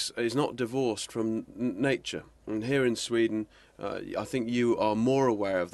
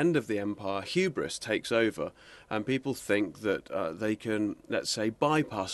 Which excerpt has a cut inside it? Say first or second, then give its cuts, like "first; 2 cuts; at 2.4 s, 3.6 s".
second; 1 cut; at 2.8 s